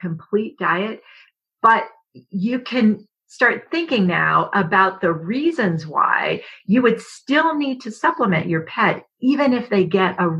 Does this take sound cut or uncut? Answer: uncut